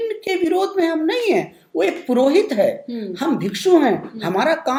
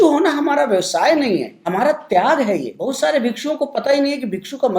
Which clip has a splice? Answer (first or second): second